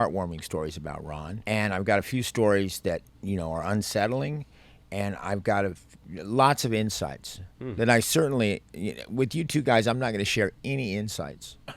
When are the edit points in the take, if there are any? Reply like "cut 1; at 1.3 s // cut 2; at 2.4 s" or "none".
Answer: cut 1; at 1.3 s // cut 2; at 3.1 s